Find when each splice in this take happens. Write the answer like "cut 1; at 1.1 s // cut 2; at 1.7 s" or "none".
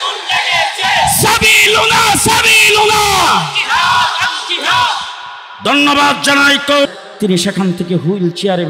cut 1; at 6.9 s